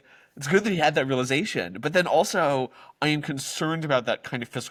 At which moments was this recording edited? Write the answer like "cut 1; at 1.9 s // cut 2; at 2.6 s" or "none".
none

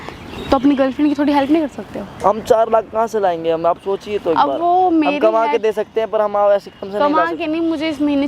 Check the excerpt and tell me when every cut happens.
none

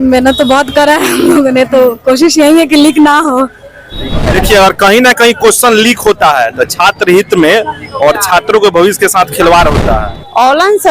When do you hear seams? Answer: cut 1; at 4.3 s // cut 2; at 9.9 s

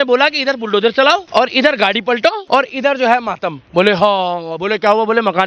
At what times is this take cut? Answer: cut 1; at 1.3 s // cut 2; at 2.4 s

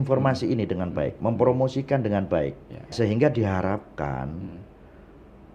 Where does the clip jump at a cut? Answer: cut 1; at 2.9 s

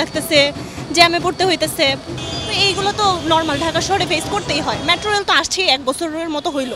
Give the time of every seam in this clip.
none

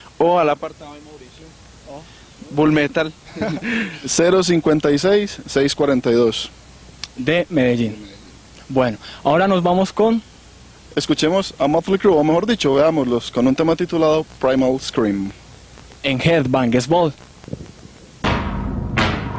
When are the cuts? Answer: cut 1; at 2.7 s

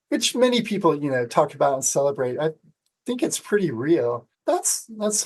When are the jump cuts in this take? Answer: cut 1; at 4.3 s

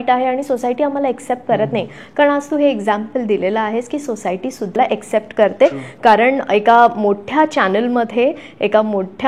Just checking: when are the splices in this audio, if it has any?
cut 1; at 4.8 s

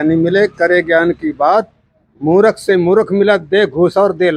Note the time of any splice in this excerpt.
none

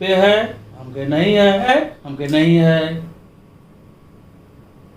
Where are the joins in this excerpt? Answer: cut 1; at 1.7 s

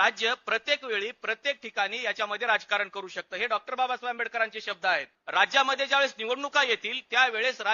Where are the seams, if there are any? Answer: cut 1; at 5.2 s

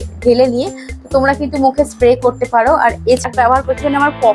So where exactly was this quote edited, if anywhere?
cut 1; at 3.2 s

